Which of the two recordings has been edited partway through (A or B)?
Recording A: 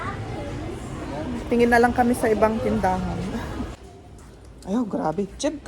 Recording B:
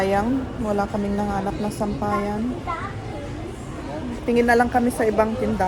A